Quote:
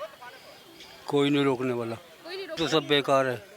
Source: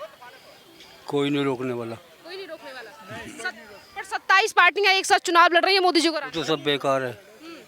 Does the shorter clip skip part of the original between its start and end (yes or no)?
yes